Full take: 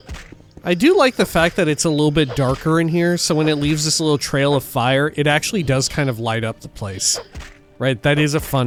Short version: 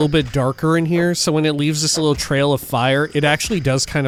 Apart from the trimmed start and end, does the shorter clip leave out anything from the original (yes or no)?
no